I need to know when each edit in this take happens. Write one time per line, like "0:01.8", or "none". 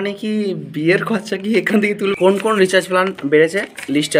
0:02.2